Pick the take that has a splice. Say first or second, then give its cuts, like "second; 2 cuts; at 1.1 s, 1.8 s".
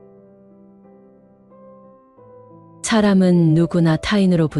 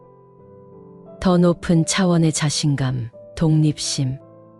first; 1 cut; at 2.8 s